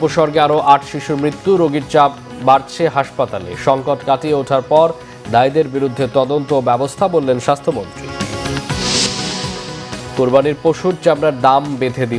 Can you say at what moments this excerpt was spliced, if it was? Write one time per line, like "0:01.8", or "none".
none